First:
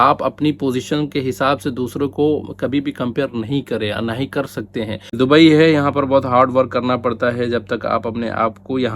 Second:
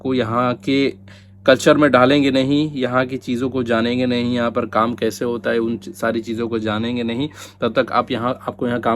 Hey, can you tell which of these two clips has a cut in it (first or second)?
first